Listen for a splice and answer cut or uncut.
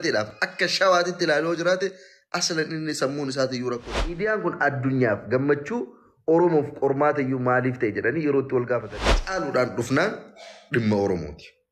cut